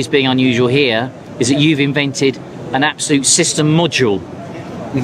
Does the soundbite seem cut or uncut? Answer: uncut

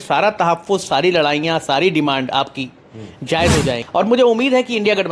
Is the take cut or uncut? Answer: cut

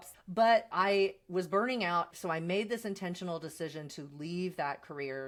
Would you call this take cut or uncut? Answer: uncut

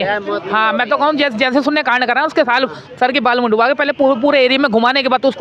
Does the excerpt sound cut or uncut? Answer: uncut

